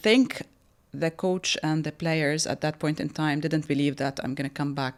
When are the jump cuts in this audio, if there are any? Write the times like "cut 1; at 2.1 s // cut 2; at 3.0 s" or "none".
none